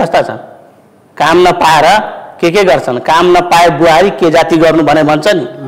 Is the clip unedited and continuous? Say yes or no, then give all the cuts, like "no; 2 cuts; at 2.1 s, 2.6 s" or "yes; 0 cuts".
yes; 0 cuts